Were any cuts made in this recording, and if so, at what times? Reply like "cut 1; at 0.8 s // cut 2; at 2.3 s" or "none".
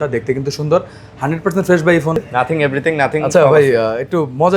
cut 1; at 2.2 s